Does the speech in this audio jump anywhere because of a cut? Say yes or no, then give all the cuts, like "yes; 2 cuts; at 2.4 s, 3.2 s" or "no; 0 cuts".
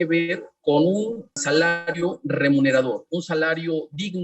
yes; 1 cut; at 1.4 s